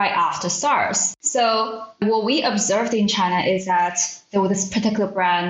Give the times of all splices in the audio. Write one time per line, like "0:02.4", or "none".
0:01.1
0:02.0